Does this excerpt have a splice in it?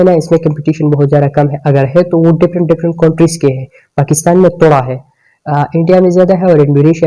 no; 0 cuts

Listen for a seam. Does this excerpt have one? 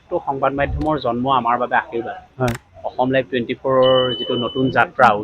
yes; 1 cut; at 2.6 s

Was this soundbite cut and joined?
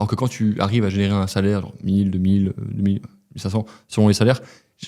no; 0 cuts

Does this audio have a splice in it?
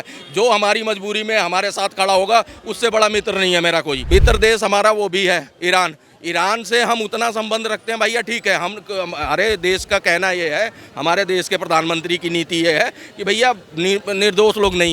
yes; 1 cut; at 4.0 s

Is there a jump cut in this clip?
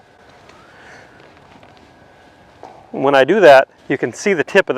yes; 1 cut; at 3.8 s

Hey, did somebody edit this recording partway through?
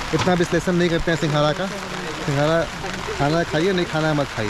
no; 0 cuts

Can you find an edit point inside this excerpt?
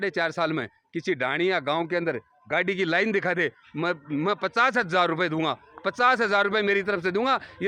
no; 0 cuts

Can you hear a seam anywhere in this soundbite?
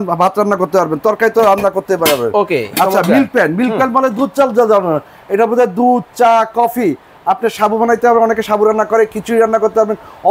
no; 0 cuts

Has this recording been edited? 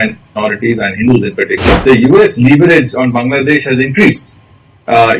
yes; 1 cut; at 1.8 s

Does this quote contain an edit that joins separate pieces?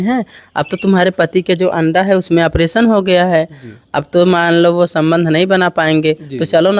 no; 0 cuts

